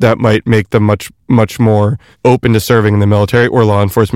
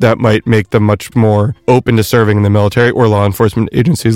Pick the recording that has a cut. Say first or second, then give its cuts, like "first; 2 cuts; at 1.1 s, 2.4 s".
second; 1 cut; at 1.3 s